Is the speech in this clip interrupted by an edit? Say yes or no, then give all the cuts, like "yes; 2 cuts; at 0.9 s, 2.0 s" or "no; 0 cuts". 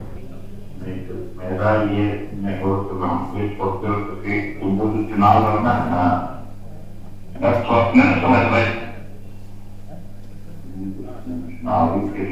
no; 0 cuts